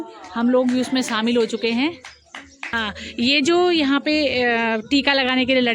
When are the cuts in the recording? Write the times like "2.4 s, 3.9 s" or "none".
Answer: 2.7 s